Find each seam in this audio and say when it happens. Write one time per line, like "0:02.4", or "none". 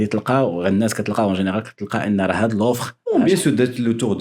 0:02.9